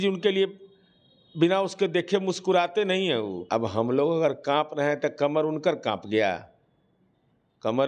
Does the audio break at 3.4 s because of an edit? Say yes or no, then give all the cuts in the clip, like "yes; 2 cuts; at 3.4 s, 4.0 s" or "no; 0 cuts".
yes; 1 cut; at 3.4 s